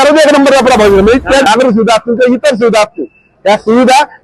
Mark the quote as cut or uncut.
cut